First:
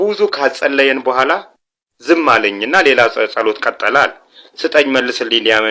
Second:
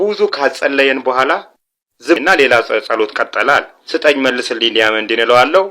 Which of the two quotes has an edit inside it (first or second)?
second